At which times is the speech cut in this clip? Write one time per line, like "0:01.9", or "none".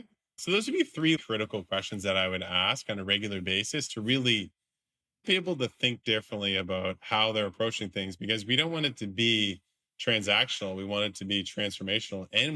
0:01.2